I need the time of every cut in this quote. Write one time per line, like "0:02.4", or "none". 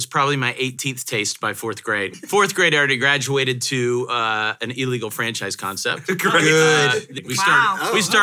0:02.1
0:07.1